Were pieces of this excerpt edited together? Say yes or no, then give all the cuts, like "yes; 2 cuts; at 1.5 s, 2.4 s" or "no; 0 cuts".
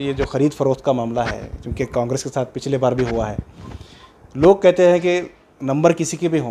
no; 0 cuts